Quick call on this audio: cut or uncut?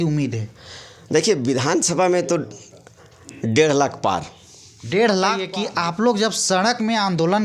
cut